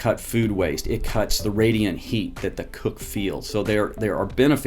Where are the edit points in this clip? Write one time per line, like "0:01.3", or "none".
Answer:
0:01.4